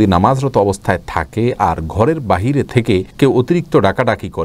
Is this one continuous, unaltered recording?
yes; 0 cuts

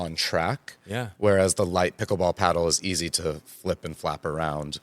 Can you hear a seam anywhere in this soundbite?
no; 0 cuts

